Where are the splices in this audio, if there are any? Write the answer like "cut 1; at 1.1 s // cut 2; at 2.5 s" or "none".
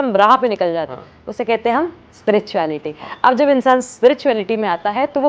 none